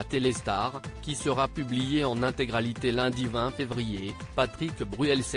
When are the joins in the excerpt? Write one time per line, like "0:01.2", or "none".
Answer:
none